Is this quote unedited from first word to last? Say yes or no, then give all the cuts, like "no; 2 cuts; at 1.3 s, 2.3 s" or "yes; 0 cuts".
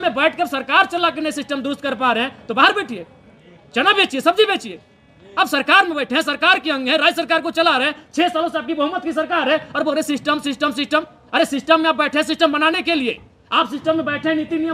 yes; 0 cuts